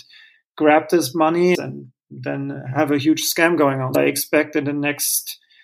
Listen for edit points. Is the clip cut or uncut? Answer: cut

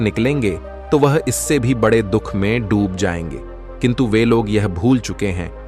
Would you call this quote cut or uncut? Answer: uncut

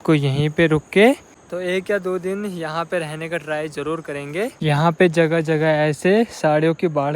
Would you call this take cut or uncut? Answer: cut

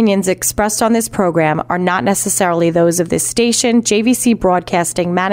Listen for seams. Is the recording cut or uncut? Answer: uncut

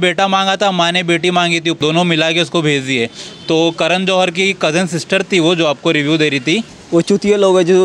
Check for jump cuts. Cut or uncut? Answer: cut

